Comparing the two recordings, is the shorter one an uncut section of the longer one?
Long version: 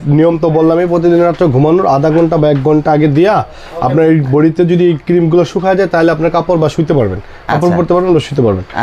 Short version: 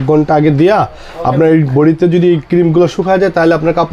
yes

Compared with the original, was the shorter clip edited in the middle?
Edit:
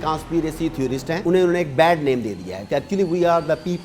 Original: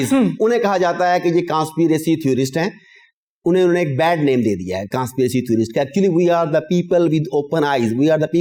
yes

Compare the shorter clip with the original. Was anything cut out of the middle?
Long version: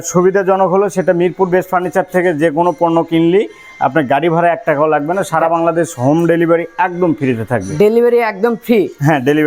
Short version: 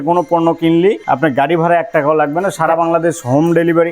yes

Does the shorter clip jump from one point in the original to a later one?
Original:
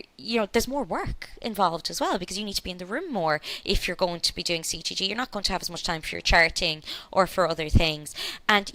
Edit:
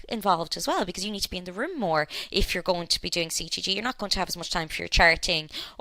no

